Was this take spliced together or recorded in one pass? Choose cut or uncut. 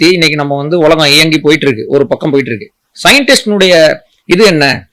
uncut